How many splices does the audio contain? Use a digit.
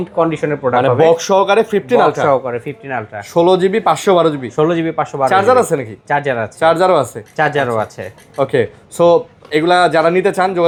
0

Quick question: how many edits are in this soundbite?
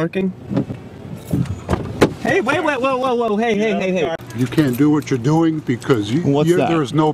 1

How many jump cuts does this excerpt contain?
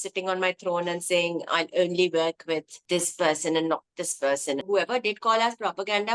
2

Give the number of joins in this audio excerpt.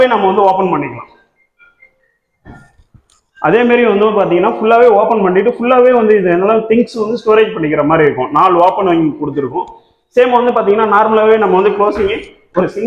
0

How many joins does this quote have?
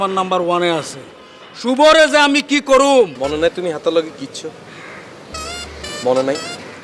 1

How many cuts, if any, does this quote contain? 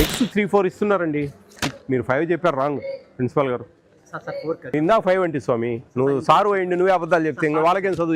1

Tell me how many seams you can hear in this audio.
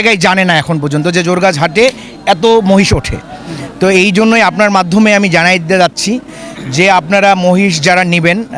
0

